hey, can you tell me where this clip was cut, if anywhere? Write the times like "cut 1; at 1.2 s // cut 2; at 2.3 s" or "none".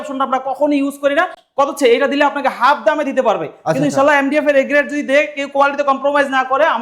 none